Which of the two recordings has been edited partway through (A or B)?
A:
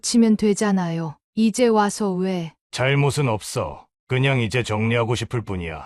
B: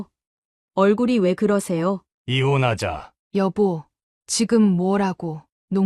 B